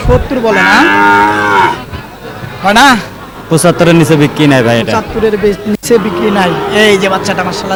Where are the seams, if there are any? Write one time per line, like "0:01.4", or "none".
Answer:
none

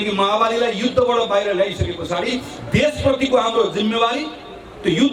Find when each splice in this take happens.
none

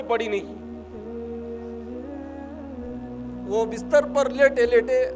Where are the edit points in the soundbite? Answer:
none

